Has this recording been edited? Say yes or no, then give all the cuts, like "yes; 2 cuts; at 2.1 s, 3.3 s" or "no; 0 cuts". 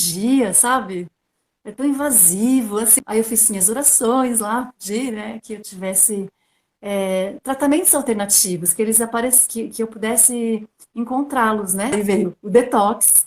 yes; 2 cuts; at 2.9 s, 11.9 s